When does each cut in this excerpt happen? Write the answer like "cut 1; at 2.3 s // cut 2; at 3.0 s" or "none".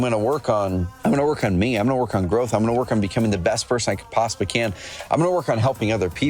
cut 1; at 0.9 s